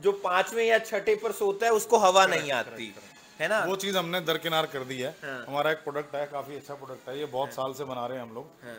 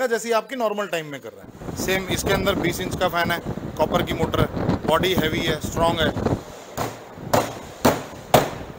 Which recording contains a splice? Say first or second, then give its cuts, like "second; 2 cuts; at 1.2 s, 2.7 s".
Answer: second; 1 cut; at 1.6 s